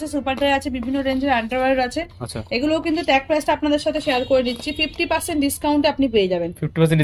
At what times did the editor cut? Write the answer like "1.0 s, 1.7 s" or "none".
none